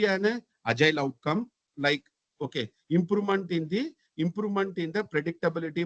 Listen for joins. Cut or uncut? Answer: uncut